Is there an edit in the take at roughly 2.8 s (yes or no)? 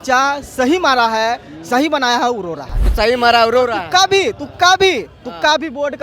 yes